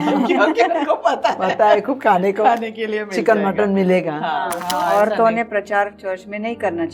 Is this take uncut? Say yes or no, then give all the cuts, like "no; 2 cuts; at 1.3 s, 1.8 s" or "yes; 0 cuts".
no; 1 cut; at 4.6 s